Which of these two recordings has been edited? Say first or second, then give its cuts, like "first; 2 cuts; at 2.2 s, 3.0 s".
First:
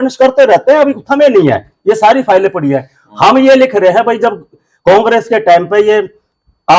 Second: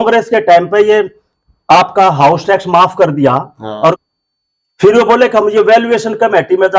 second; 1 cut; at 4.0 s